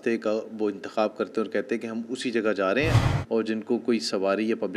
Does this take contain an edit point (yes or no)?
yes